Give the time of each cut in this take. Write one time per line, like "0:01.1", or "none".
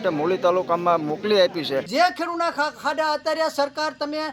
0:01.9